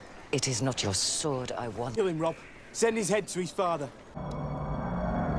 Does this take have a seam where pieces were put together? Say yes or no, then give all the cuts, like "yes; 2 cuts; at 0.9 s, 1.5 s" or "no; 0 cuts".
no; 0 cuts